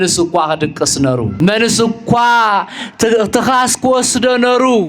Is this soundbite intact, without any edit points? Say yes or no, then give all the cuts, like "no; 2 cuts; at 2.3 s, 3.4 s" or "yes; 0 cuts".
no; 1 cut; at 1.3 s